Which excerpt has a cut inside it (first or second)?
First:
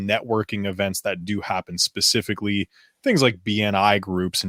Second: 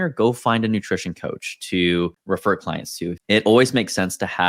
second